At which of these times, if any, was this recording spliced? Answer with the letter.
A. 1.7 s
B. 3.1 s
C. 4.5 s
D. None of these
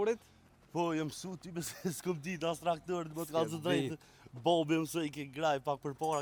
D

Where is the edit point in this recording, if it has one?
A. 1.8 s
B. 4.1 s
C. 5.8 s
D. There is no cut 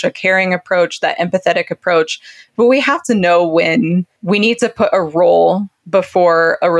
B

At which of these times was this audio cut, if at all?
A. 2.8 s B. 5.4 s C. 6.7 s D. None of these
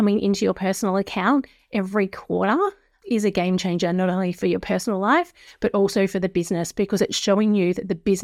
D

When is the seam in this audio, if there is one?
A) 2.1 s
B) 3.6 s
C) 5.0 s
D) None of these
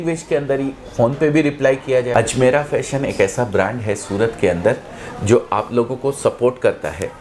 A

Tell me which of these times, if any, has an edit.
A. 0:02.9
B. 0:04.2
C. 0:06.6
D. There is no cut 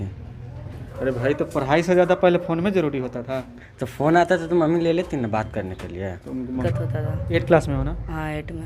C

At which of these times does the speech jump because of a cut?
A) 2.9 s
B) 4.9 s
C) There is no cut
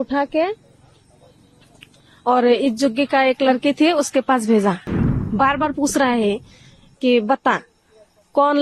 B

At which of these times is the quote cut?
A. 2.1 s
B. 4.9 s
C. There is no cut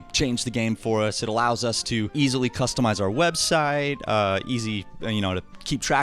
A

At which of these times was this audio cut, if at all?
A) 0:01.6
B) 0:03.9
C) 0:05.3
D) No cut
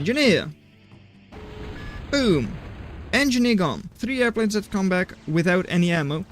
B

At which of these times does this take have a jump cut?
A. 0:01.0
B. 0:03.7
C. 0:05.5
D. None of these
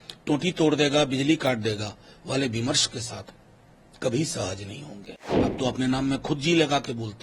C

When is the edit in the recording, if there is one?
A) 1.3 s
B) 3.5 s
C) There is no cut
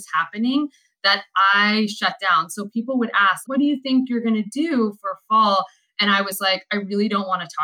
C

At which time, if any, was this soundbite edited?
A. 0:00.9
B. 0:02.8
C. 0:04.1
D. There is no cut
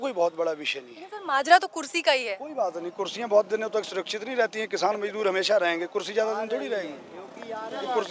D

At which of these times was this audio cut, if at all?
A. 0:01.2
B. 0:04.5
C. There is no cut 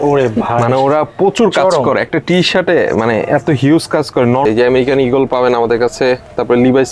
B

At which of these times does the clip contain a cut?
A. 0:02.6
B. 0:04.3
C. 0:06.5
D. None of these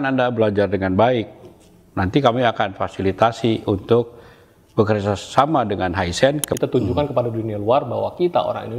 C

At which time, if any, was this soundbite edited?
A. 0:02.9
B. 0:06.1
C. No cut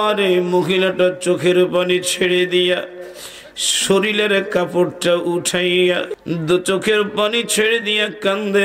B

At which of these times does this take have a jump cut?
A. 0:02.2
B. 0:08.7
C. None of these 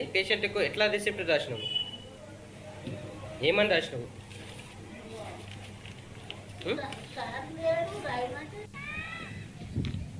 B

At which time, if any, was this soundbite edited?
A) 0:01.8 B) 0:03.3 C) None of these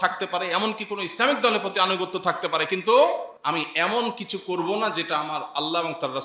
B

